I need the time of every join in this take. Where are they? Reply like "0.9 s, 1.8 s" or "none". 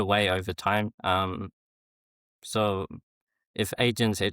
1.0 s

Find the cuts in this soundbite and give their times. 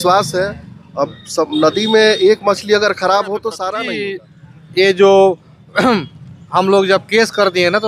3.7 s

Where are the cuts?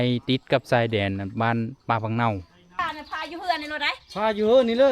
2.7 s

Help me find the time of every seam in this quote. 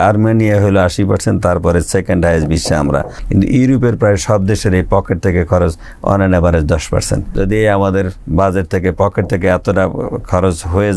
3.2 s, 7.3 s

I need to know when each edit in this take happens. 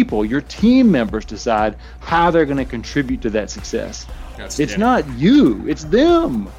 none

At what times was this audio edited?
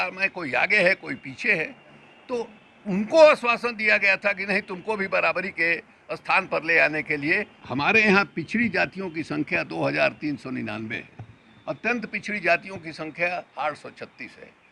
7.6 s

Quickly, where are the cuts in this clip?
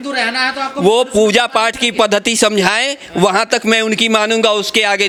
none

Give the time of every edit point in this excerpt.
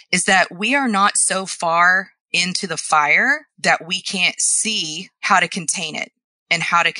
5.1 s

